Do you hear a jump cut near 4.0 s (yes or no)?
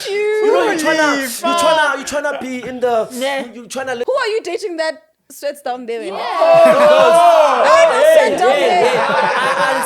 yes